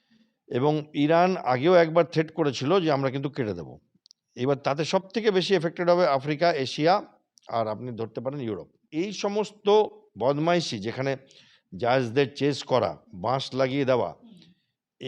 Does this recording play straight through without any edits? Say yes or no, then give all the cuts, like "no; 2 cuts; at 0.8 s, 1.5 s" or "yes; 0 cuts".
no; 1 cut; at 8.8 s